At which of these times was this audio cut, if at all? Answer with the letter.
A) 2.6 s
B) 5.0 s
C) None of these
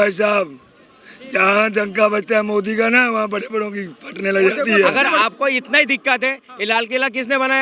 B